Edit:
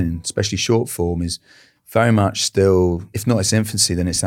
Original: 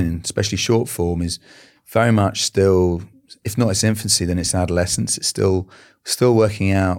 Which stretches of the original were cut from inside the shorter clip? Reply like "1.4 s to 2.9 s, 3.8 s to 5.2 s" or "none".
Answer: 3.1 s to 3.4 s